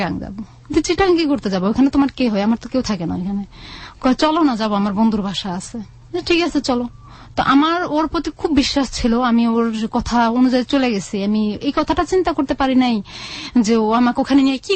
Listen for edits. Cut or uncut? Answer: uncut